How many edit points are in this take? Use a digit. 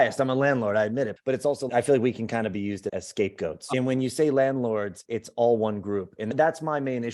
2